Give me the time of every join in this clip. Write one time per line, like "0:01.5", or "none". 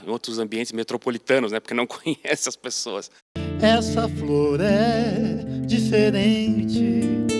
0:03.4